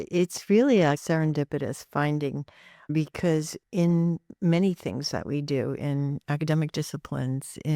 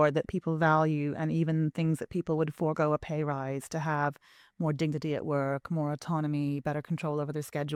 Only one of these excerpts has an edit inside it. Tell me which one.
first; 1 cut; at 1.0 s

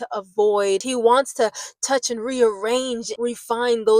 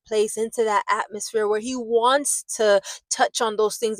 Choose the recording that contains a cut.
first; 2 cuts; at 0.9 s, 3.1 s

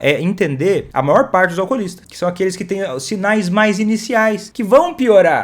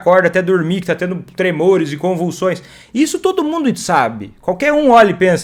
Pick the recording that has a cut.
first; 3 cuts; at 0.9 s, 2.0 s, 4.5 s

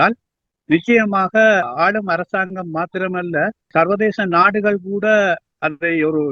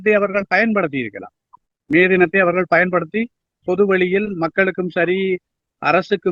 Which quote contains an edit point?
first; 2 cuts; at 1.7 s, 3.7 s

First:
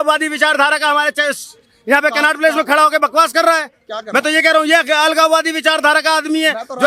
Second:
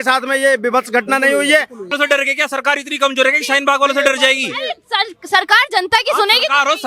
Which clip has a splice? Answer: second; 1 cut; at 1.9 s

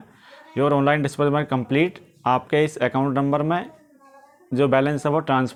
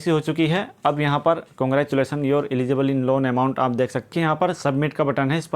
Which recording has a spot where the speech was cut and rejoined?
second; 1 cut; at 4.1 s

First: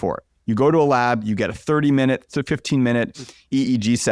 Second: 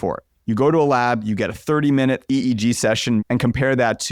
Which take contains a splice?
second; 2 cuts; at 2.2 s, 3.2 s

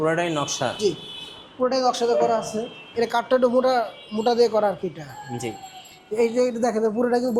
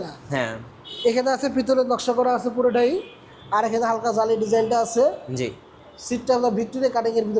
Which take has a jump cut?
first; 1 cut; at 2.8 s

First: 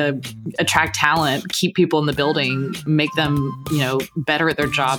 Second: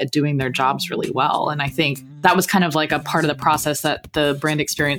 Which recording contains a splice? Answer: second; 1 cut; at 2.0 s

